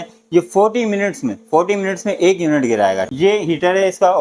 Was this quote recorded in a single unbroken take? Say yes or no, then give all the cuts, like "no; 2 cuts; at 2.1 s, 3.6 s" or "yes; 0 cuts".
no; 1 cut; at 3.0 s